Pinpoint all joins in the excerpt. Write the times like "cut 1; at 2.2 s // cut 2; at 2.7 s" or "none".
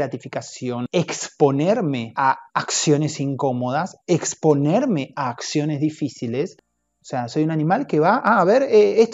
cut 1; at 0.8 s // cut 2; at 2.1 s // cut 3; at 6.7 s